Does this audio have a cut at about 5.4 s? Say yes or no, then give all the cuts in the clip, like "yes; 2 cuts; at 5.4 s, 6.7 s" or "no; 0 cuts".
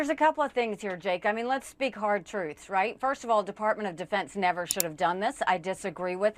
no; 0 cuts